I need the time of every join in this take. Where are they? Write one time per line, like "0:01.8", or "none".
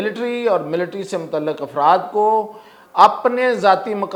none